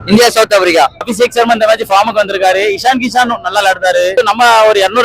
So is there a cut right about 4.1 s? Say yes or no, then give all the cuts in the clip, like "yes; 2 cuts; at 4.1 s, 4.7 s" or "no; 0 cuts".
yes; 2 cuts; at 1.0 s, 4.1 s